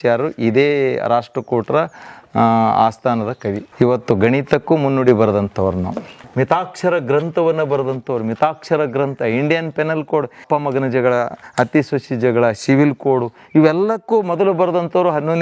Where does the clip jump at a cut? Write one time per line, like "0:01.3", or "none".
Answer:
0:03.6
0:06.2
0:10.4